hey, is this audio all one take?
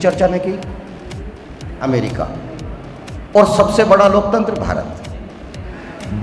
no; 1 cut; at 1.7 s

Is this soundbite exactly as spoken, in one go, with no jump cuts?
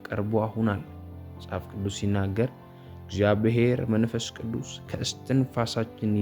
yes; 0 cuts

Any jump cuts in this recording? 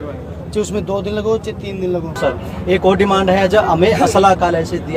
yes; 1 cut; at 2.2 s

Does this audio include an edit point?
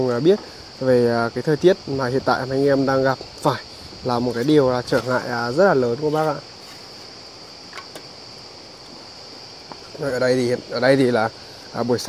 no; 0 cuts

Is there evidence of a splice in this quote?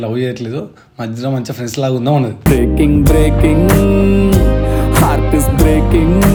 no; 0 cuts

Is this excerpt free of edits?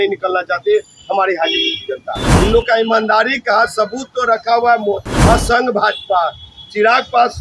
no; 2 cuts; at 2.2 s, 5.1 s

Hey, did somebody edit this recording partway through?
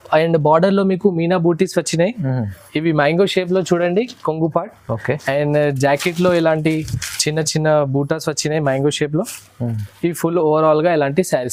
no; 0 cuts

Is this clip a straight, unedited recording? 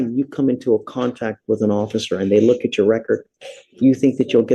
yes; 0 cuts

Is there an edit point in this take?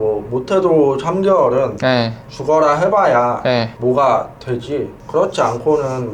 yes; 2 cuts; at 3.7 s, 5.0 s

